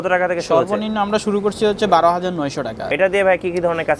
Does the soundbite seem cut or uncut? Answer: cut